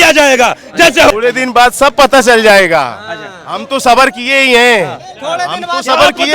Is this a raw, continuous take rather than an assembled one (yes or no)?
no